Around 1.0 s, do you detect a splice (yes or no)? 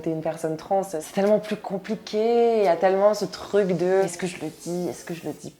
yes